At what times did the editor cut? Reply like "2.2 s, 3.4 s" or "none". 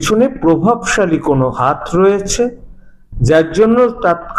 none